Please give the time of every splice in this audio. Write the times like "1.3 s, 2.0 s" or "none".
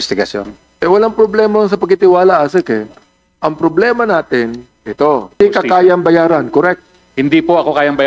5.4 s